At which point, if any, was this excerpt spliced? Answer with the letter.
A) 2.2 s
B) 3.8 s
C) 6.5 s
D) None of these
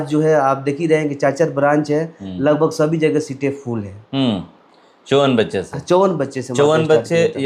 D